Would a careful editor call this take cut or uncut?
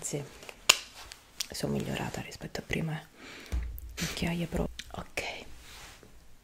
cut